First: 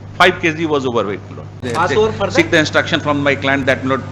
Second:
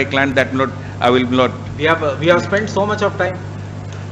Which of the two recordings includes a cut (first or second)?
first